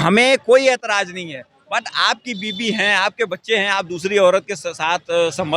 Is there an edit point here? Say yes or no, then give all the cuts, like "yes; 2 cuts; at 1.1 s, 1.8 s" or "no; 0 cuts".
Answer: no; 0 cuts